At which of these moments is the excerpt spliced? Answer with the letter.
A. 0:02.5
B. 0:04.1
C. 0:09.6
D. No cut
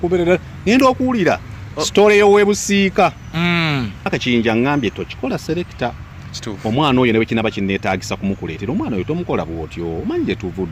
B